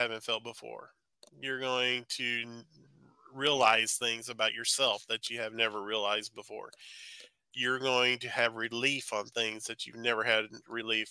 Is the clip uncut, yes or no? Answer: yes